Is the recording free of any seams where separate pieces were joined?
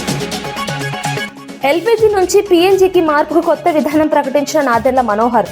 no; 1 cut; at 1.2 s

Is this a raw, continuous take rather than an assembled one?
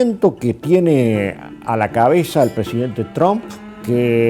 no; 1 cut; at 2.6 s

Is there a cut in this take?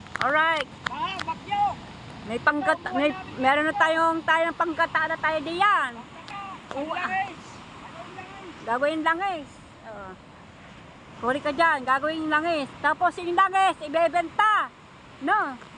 no; 0 cuts

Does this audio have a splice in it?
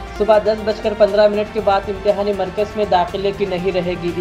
no; 0 cuts

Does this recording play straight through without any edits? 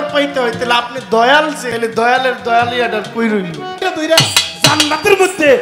no; 2 cuts; at 1.6 s, 3.8 s

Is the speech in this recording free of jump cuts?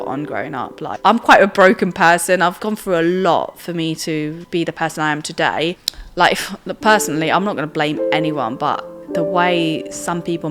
no; 4 cuts; at 0.9 s, 2.6 s, 4.4 s, 5.9 s

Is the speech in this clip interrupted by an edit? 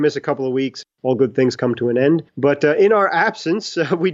yes; 1 cut; at 1.0 s

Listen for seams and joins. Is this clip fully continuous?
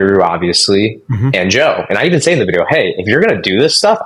yes; 0 cuts

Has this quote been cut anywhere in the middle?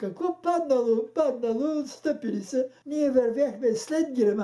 yes; 1 cut; at 2.8 s

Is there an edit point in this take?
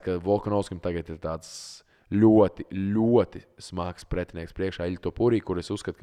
no; 0 cuts

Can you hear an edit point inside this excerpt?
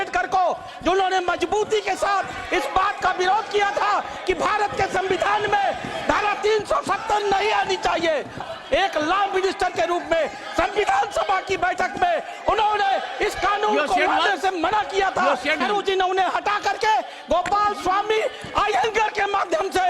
yes; 2 cuts; at 8.4 s, 15.6 s

